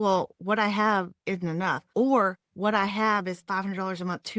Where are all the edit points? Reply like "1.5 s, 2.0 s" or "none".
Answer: 1.6 s, 2.5 s